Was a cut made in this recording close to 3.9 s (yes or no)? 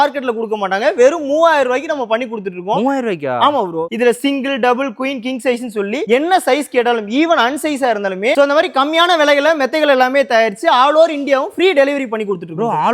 no